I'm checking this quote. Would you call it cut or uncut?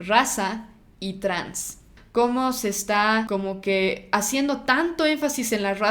cut